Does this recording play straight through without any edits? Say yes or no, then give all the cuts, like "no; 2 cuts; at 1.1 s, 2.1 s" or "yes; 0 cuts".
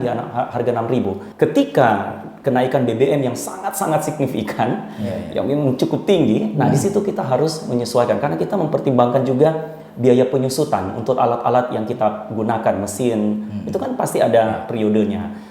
no; 1 cut; at 1.2 s